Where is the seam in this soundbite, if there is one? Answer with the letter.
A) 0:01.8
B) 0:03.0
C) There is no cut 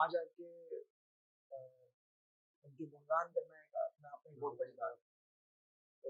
C